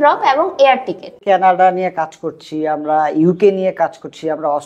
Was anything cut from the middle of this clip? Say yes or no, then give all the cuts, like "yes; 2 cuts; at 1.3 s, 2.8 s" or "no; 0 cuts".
yes; 1 cut; at 1.2 s